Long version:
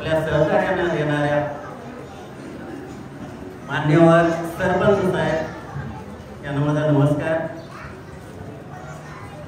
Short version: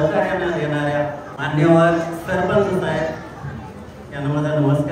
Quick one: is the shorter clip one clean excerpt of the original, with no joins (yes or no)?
no